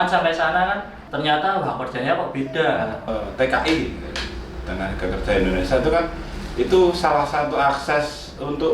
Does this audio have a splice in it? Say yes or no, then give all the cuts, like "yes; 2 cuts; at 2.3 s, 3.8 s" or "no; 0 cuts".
yes; 1 cut; at 3.1 s